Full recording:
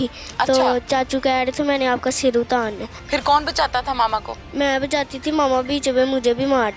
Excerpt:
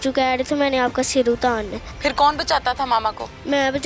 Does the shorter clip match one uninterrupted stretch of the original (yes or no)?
yes